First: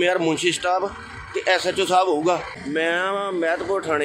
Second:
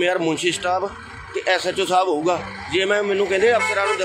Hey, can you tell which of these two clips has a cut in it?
first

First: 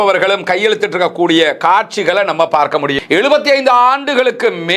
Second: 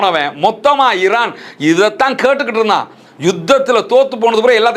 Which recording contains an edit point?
first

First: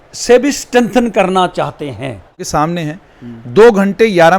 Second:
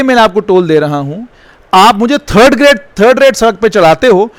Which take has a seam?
first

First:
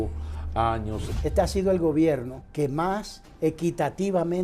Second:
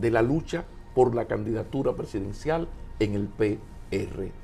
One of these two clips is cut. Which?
first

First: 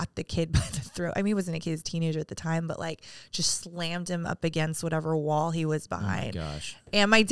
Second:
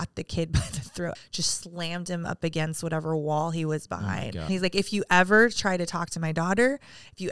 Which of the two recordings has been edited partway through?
second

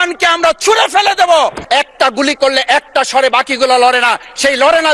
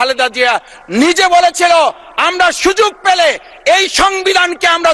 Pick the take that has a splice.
first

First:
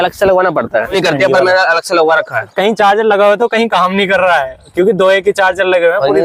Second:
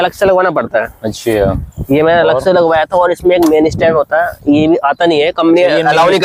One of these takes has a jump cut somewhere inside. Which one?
first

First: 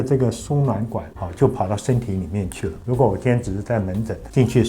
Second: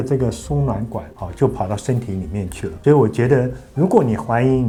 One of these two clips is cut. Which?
first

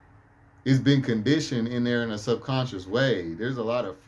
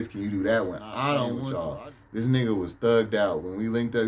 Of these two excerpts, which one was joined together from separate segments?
second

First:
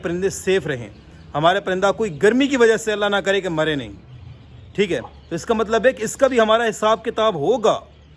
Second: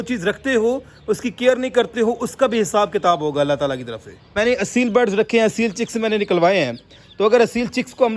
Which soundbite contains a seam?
second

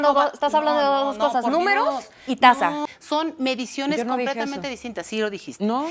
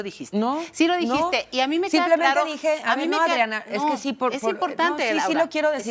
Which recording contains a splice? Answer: first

